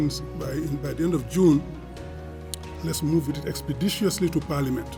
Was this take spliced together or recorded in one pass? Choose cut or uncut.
uncut